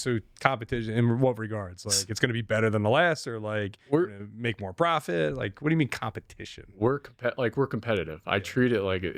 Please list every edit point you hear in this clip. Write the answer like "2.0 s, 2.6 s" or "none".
none